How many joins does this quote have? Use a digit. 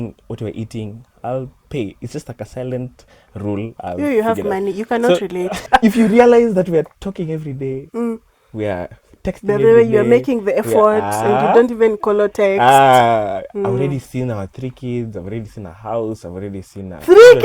1